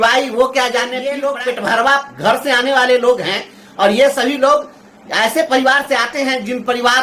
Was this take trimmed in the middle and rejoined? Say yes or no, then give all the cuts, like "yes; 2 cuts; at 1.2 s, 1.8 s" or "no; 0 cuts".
yes; 1 cut; at 1.0 s